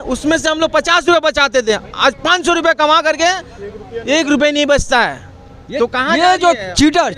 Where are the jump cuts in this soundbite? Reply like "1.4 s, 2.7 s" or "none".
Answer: none